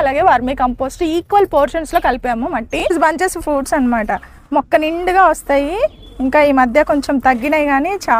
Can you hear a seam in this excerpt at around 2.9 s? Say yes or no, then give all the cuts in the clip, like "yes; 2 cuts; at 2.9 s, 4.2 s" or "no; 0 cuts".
yes; 1 cut; at 2.9 s